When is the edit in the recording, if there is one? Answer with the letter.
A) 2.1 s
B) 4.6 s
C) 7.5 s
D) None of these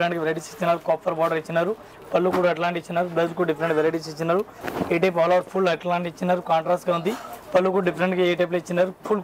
B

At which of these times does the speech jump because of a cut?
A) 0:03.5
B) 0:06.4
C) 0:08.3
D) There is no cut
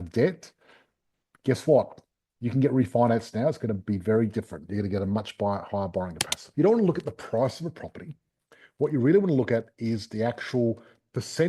B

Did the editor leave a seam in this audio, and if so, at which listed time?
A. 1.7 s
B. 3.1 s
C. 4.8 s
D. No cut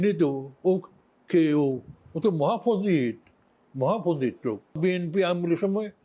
C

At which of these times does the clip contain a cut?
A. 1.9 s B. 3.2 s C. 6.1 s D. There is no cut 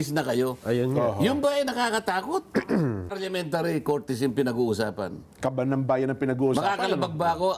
B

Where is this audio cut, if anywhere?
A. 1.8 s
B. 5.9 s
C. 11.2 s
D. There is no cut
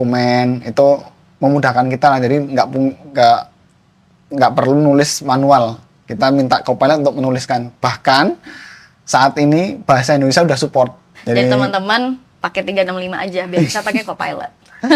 C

